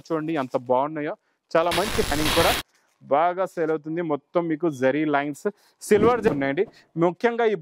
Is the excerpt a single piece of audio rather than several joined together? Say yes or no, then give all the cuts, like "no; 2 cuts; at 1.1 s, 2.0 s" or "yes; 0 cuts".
no; 2 cuts; at 2.1 s, 6.3 s